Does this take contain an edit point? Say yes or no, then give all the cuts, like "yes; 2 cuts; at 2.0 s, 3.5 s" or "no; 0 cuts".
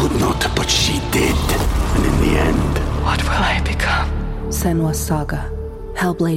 no; 0 cuts